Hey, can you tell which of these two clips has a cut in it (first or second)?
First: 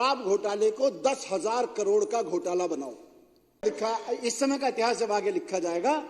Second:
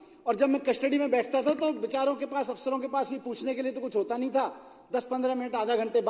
first